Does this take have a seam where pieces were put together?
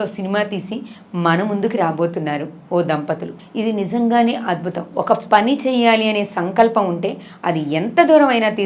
yes; 1 cut; at 3.4 s

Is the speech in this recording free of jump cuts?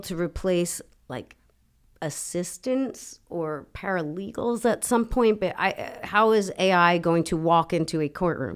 yes; 0 cuts

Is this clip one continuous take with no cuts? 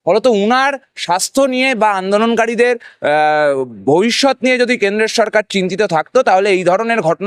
yes; 0 cuts

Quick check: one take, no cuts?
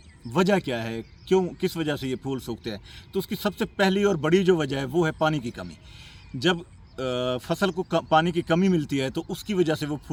yes; 0 cuts

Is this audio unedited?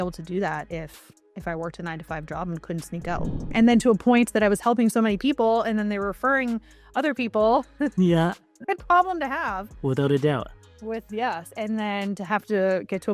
no; 1 cut; at 3.4 s

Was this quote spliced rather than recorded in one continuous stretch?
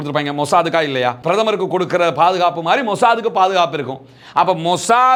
no; 0 cuts

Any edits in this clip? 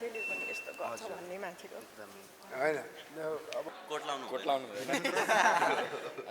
yes; 1 cut; at 3.7 s

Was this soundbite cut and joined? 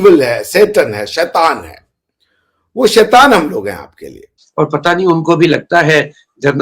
yes; 1 cut; at 4.4 s

